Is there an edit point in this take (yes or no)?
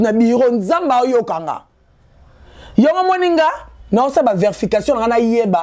no